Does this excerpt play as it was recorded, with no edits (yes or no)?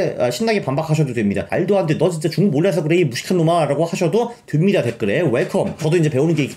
no